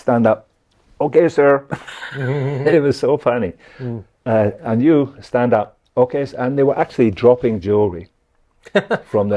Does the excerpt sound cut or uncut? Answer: uncut